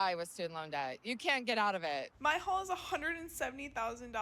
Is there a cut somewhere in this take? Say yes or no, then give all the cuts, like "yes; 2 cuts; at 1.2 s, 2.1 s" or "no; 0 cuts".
no; 0 cuts